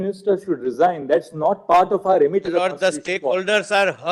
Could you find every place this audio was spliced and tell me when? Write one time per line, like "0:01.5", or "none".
none